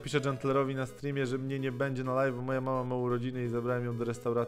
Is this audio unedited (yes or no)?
yes